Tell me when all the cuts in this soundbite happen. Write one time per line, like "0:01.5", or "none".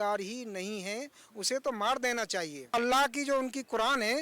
0:02.7